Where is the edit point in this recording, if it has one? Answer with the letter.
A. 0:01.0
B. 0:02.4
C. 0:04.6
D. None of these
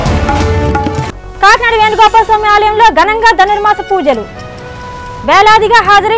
A